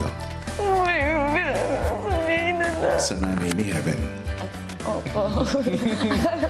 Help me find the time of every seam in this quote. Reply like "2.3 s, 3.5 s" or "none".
1.8 s